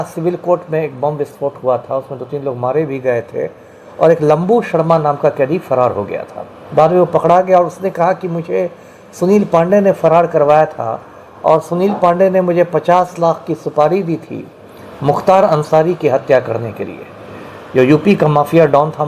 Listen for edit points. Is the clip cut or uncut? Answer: uncut